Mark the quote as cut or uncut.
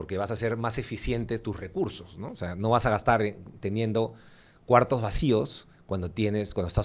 uncut